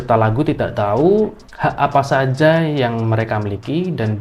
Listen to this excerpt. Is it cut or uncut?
cut